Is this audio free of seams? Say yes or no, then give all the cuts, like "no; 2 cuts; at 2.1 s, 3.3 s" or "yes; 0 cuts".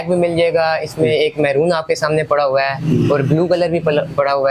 yes; 0 cuts